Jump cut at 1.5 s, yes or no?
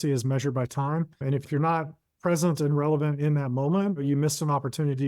yes